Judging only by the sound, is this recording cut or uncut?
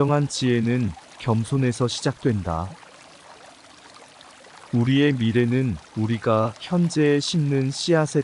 cut